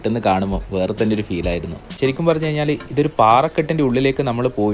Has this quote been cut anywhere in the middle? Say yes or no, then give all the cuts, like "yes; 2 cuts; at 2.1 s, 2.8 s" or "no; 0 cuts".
yes; 1 cut; at 1.8 s